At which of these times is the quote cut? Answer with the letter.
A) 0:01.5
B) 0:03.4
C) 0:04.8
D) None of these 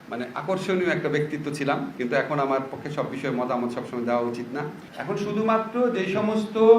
C